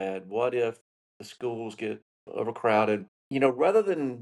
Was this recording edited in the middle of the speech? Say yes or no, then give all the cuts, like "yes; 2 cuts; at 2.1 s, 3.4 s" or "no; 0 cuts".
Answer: yes; 1 cut; at 3.2 s